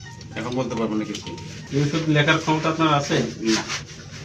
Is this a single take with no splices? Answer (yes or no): no